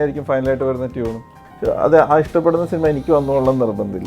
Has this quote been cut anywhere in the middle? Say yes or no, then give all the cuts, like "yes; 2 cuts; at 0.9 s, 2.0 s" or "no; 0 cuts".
yes; 1 cut; at 1.4 s